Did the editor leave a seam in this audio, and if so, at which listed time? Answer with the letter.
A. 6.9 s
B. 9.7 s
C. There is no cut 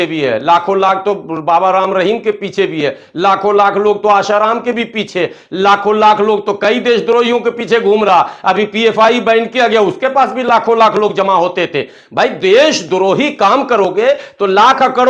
C